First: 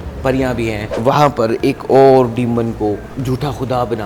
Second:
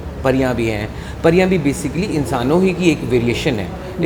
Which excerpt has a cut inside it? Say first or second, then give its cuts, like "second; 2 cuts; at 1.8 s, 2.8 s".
first; 2 cuts; at 0.9 s, 3.1 s